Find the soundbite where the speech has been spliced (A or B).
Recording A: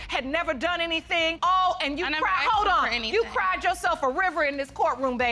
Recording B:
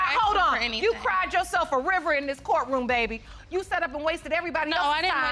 A